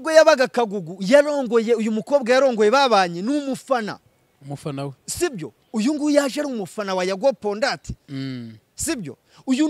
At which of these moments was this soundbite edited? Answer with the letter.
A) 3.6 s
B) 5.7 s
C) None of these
C